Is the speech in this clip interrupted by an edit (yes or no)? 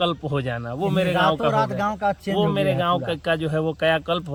no